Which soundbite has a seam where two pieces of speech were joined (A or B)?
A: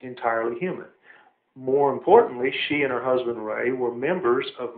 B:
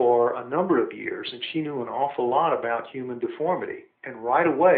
B